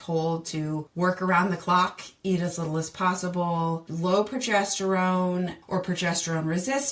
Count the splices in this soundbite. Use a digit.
3